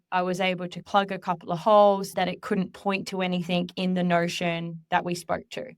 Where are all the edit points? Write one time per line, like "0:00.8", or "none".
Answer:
0:02.1